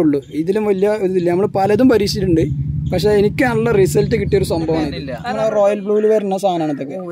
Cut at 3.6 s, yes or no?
no